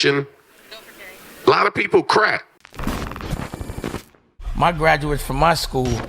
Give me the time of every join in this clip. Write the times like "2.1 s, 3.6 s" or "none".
2.6 s